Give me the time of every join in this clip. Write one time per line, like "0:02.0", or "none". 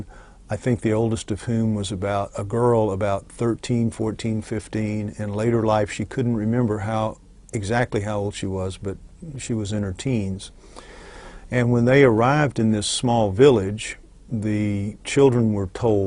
none